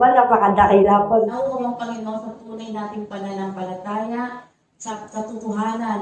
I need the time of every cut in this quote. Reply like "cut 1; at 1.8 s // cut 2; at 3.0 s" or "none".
cut 1; at 1.3 s // cut 2; at 4.9 s